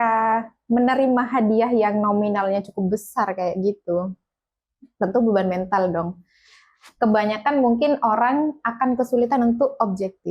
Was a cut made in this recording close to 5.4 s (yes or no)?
no